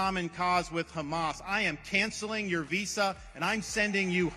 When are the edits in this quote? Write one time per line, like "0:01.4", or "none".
none